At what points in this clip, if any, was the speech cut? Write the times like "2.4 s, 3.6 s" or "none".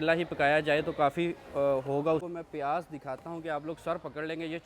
2.2 s